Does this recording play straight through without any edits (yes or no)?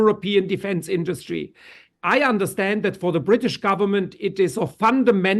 no